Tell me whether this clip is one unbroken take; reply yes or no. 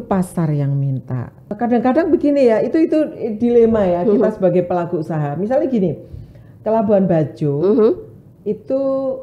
no